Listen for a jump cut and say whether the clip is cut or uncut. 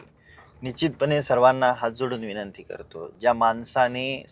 uncut